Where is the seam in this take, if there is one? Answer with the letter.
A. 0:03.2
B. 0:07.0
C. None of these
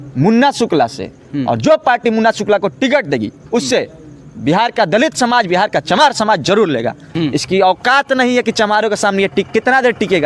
B